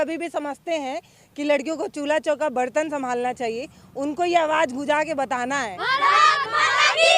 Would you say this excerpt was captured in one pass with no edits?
no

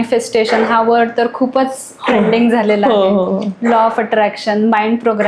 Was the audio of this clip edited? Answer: no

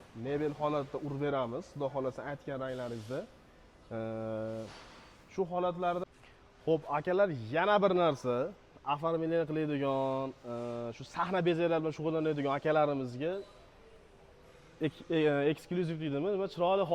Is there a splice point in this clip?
yes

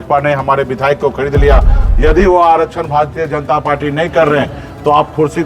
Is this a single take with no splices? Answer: no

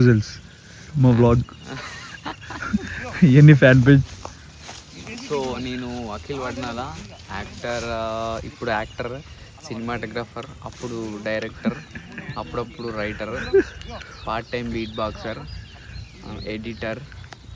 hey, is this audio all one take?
yes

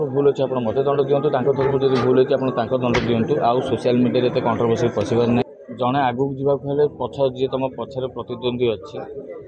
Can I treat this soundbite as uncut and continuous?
no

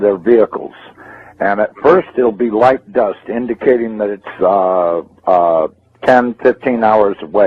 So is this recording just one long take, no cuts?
no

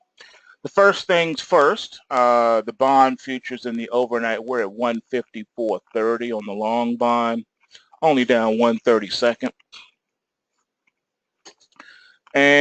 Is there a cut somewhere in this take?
yes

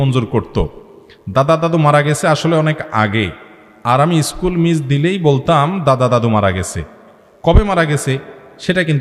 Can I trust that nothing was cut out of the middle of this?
yes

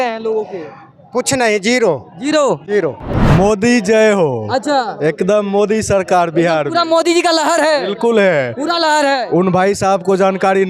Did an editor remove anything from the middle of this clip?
yes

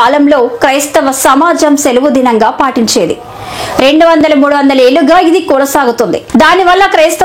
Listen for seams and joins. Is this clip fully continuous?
no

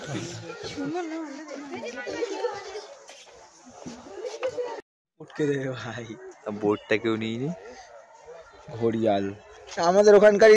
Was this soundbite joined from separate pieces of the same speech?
no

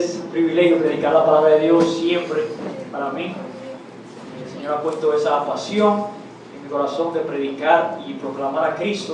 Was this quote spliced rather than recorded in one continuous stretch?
no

